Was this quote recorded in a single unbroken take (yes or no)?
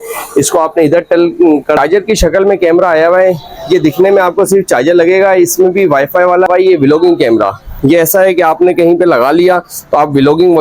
no